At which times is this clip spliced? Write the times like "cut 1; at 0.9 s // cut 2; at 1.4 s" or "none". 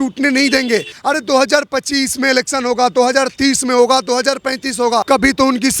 cut 1; at 0.9 s // cut 2; at 5.0 s